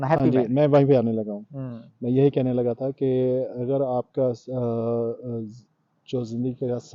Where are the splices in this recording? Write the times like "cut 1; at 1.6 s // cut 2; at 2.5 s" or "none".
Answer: none

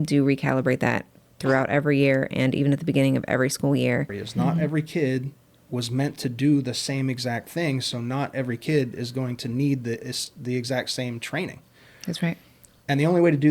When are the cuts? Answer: cut 1; at 4.2 s

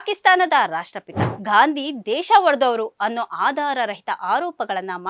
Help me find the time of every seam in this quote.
cut 1; at 1.2 s

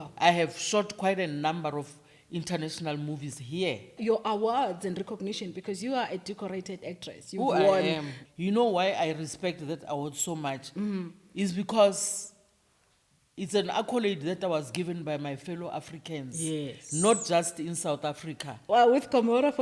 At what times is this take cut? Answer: cut 1; at 4.0 s // cut 2; at 8.1 s // cut 3; at 18.5 s

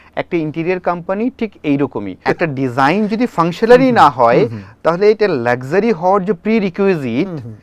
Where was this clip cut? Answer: cut 1; at 2.1 s

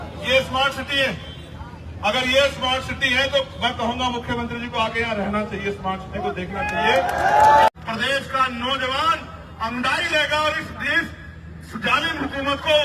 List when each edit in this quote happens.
cut 1; at 7.7 s

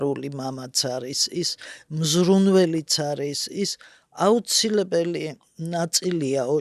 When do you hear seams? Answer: none

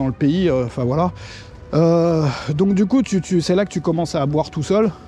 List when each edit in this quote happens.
none

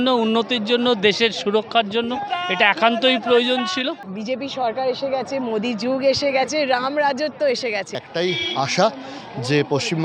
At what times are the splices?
cut 1; at 4.0 s // cut 2; at 8.1 s

